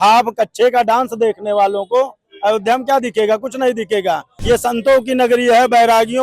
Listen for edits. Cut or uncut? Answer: cut